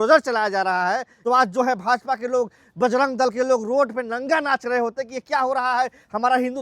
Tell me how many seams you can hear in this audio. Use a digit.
1